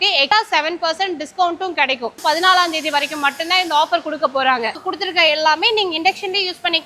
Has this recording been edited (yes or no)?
yes